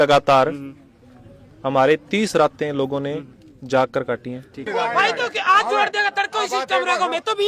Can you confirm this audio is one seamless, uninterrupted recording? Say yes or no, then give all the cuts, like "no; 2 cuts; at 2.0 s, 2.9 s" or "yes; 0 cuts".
no; 1 cut; at 4.5 s